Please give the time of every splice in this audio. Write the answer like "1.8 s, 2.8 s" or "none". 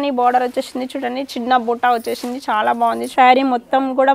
3.1 s